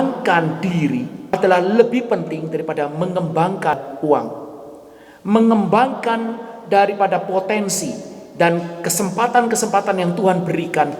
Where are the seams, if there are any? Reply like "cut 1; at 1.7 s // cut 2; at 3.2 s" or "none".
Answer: cut 1; at 1.3 s